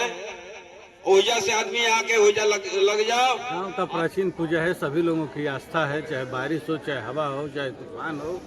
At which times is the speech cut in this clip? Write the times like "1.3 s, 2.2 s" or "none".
3.6 s